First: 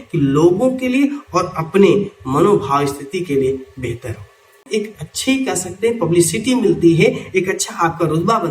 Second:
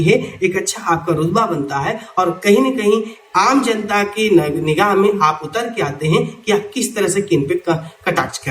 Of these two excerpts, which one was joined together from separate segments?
first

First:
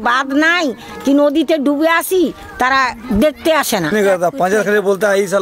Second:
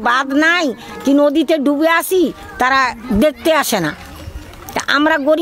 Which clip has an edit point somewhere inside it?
first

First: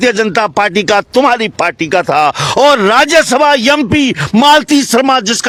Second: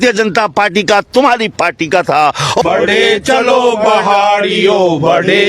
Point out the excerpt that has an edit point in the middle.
second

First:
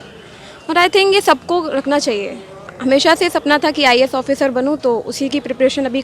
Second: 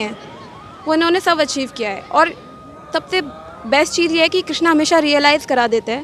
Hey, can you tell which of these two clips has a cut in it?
first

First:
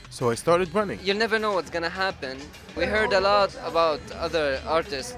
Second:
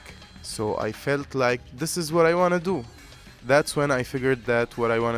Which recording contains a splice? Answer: first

